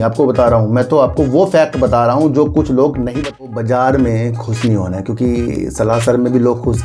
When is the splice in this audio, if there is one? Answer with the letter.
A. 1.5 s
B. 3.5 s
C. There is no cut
B